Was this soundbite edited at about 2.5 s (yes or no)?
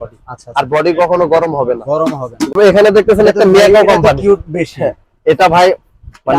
yes